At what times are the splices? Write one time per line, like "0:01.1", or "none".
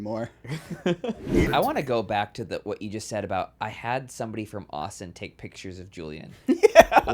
0:01.5